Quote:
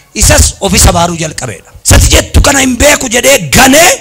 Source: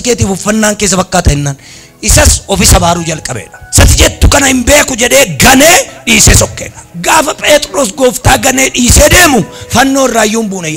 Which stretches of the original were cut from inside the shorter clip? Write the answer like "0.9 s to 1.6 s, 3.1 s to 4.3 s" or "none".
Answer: none

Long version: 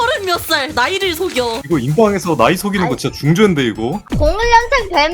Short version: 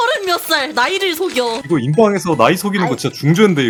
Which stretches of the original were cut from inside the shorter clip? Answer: none

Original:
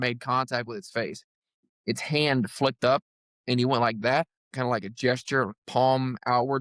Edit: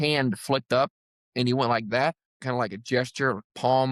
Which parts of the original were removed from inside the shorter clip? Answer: none

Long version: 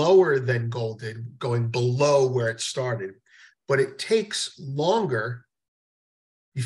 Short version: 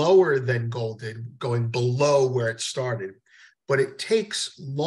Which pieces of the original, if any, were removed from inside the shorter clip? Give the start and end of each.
none

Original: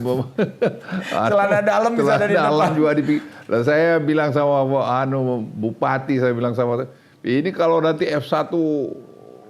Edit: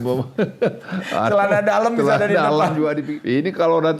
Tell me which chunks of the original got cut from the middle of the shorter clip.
3.1 s to 7.1 s

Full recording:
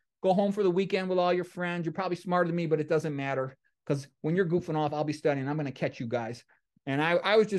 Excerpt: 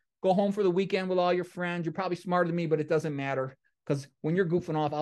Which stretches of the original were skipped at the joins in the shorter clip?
none

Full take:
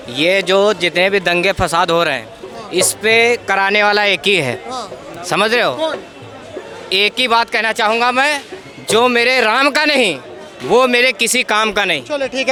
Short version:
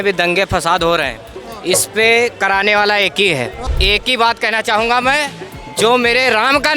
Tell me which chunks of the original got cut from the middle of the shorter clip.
4.7 s to 6.7 s

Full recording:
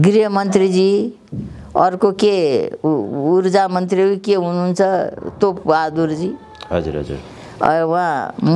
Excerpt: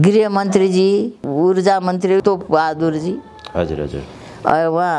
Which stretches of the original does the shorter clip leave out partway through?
1.2 s to 3.1 s, 4.1 s to 5.4 s

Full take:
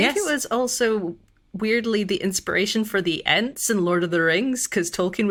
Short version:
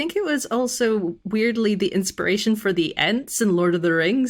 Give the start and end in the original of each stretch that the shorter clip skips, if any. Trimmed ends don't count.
1.2 s to 1.5 s

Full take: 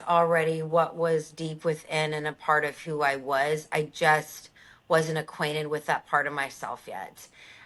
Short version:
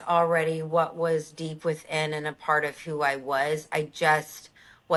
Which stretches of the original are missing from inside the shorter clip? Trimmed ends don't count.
none

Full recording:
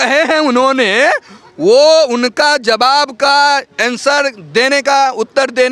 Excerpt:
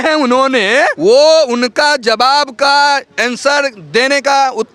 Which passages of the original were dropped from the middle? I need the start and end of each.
1.2 s to 1.6 s

